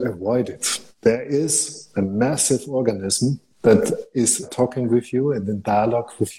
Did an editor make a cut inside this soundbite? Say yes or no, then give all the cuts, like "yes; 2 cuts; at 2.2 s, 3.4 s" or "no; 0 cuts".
no; 0 cuts